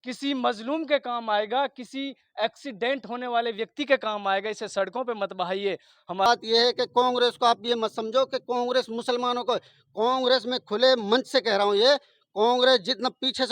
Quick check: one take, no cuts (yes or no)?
no